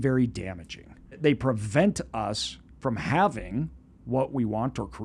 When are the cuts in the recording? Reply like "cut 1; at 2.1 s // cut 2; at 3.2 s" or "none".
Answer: cut 1; at 1.1 s